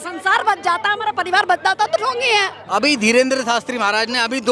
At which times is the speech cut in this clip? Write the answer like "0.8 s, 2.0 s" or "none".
2.6 s